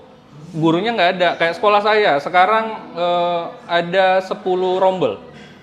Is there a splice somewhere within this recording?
no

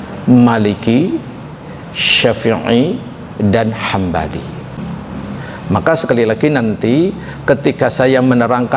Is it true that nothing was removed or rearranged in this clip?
no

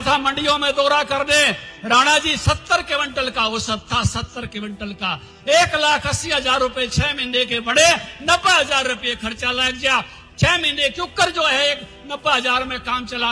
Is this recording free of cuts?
yes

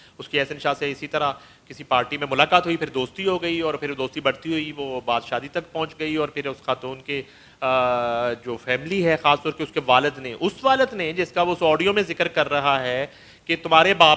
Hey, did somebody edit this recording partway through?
no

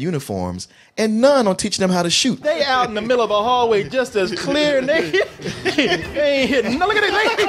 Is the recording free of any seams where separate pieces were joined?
no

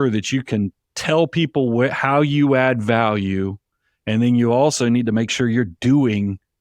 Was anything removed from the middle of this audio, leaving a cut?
no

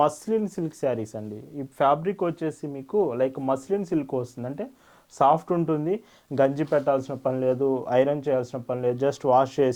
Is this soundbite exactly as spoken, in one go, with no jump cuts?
yes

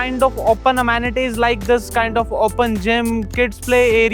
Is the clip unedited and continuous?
yes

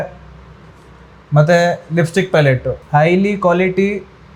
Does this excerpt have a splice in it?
yes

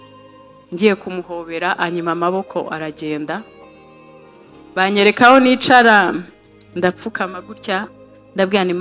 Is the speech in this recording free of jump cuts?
yes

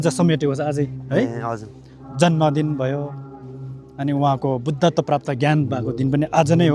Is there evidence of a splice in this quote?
no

